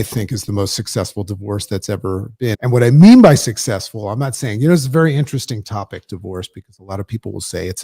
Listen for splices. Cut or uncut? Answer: cut